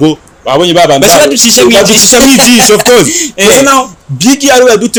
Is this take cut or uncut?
uncut